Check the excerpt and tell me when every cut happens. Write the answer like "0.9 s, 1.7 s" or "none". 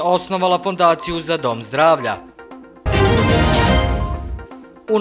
none